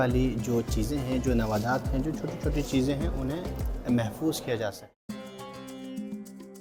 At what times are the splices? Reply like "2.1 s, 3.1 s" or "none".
none